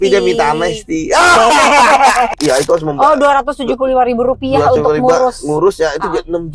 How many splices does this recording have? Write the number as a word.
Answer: one